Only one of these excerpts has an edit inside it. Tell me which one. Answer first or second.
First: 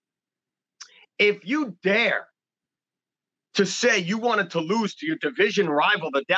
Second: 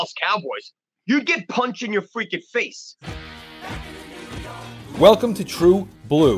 second